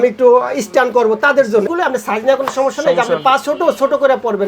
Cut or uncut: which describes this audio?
cut